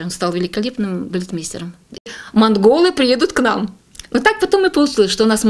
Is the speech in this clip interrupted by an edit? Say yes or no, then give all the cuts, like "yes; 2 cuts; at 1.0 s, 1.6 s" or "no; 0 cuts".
yes; 1 cut; at 2.0 s